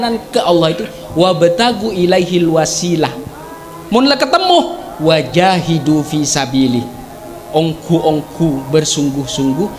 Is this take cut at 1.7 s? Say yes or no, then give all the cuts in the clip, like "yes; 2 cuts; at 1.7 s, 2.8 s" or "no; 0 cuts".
no; 0 cuts